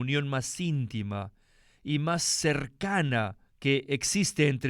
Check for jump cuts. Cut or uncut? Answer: cut